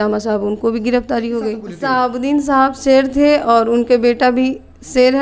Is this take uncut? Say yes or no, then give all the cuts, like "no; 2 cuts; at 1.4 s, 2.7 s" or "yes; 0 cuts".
no; 1 cut; at 1.7 s